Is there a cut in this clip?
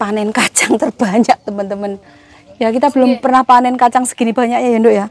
no; 0 cuts

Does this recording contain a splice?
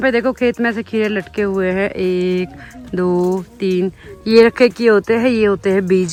no; 0 cuts

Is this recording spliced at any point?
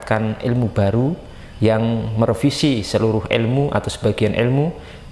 no; 0 cuts

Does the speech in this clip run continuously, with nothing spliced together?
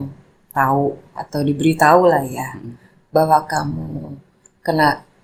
yes; 0 cuts

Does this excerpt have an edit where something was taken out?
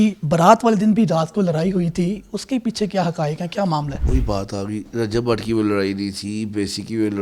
yes; 1 cut; at 4.0 s

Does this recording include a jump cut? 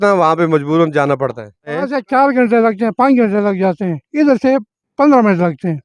yes; 1 cut; at 1.7 s

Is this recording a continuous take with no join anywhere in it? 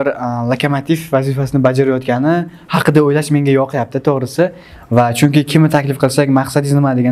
yes; 0 cuts

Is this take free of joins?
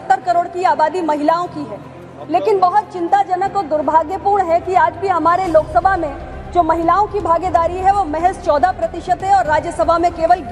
yes; 0 cuts

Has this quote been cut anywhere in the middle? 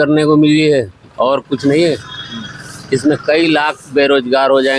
no; 0 cuts

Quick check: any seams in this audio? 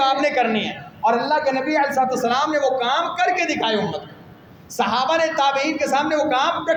no; 0 cuts

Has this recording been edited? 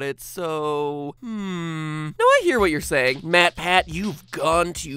yes; 1 cut; at 1.0 s

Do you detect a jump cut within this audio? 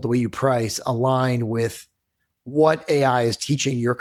no; 0 cuts

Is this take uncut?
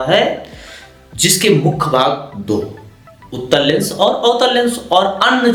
yes; 0 cuts

